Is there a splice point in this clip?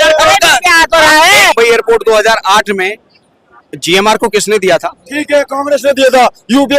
yes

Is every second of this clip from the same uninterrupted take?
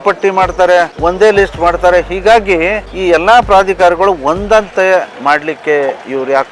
no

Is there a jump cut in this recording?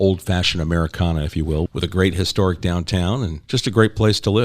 yes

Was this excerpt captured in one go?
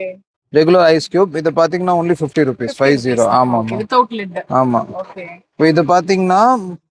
yes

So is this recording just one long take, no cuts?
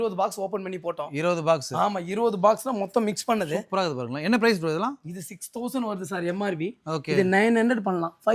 yes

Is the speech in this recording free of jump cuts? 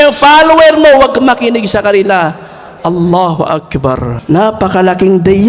no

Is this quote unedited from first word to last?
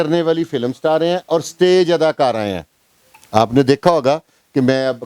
yes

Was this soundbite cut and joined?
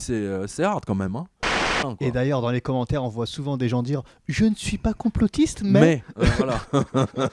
yes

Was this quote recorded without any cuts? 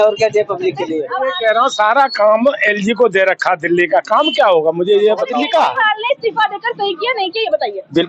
no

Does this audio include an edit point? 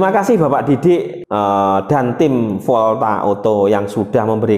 yes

